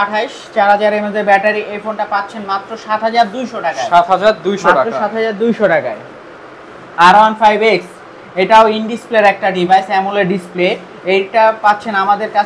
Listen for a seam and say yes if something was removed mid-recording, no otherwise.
no